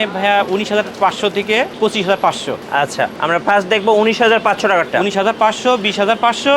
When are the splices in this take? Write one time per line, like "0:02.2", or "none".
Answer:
0:01.7
0:02.8